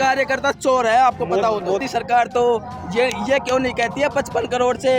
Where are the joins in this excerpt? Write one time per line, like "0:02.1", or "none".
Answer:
0:01.8